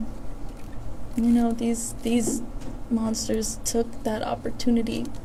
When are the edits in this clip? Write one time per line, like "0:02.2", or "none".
none

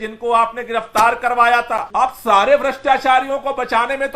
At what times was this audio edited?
0:01.9

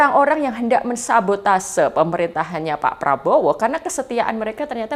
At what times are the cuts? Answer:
none

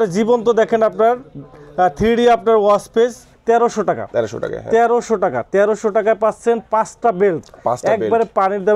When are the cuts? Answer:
0:03.3

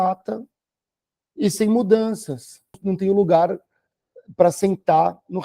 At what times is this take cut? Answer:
0:02.8

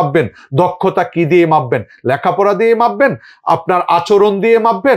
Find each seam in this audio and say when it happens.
none

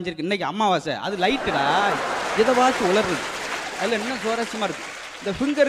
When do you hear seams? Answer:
none

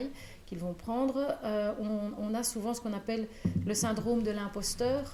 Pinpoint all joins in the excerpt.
none

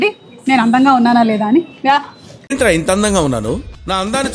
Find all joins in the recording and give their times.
none

